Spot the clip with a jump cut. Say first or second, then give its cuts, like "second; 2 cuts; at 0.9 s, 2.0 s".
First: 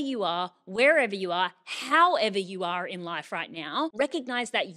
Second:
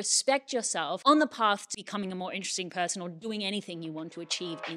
second; 2 cuts; at 1.0 s, 1.7 s